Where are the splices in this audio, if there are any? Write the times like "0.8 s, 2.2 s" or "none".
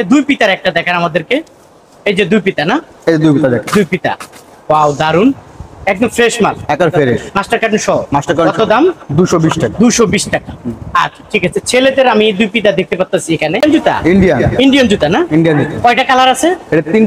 none

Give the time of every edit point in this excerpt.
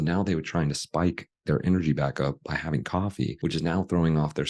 3.4 s

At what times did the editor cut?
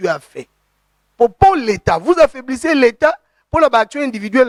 none

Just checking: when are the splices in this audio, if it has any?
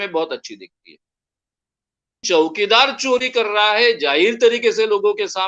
2.2 s

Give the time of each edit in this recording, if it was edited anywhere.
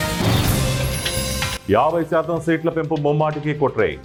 none

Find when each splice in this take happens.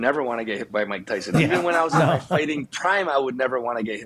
none

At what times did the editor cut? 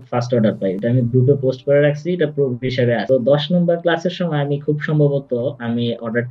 none

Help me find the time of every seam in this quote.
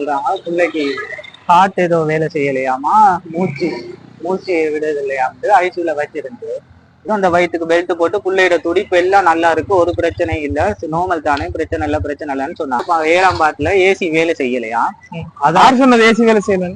7.0 s, 12.8 s

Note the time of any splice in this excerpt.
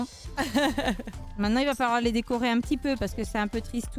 1.2 s

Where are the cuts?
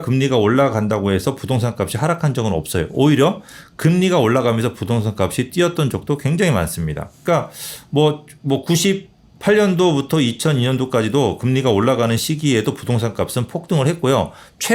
none

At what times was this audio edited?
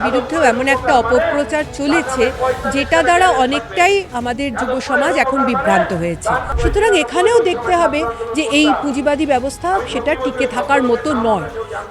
6.5 s

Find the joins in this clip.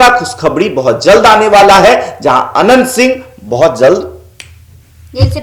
none

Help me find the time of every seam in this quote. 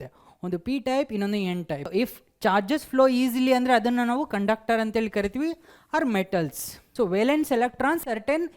1.9 s, 6.8 s

